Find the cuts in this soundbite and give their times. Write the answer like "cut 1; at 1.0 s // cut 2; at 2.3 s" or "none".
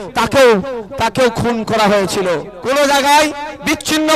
cut 1; at 2.5 s